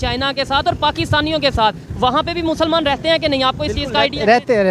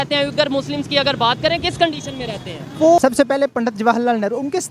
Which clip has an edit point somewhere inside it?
second; 1 cut; at 3.0 s

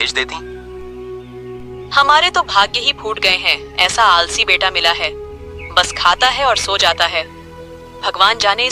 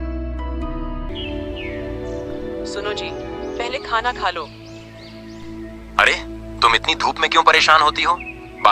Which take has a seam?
second; 1 cut; at 1.1 s

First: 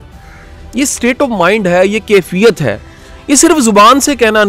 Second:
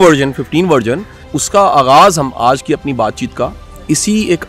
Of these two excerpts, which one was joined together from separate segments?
second; 1 cut; at 1.3 s

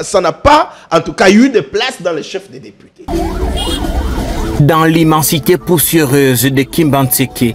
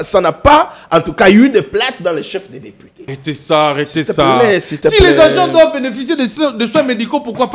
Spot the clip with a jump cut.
second; 1 cut; at 3.0 s

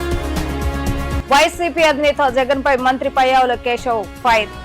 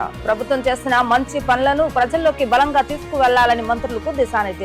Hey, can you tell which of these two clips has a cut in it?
first; 1 cut; at 1.2 s

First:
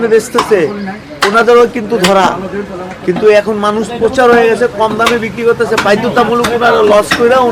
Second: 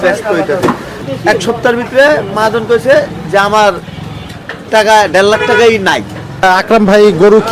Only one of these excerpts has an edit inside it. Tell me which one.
second; 2 cuts; at 0.9 s, 6.4 s

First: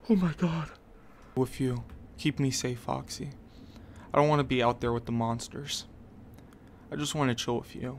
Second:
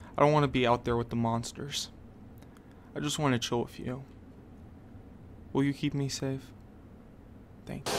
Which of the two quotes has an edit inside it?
first; 1 cut; at 1.4 s

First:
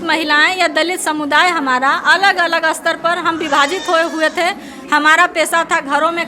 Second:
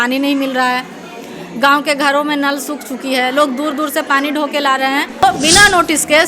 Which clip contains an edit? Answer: second; 1 cut; at 5.2 s

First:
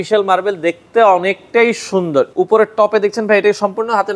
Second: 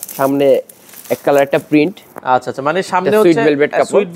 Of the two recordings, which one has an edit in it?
first; 1 cut; at 2.3 s

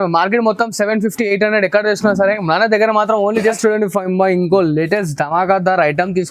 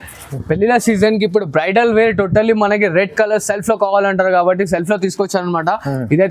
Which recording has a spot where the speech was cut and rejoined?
first; 1 cut; at 3.6 s

